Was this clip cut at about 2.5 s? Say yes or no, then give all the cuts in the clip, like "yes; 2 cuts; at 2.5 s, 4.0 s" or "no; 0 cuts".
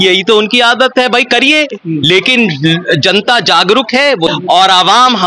no; 1 cut; at 4.3 s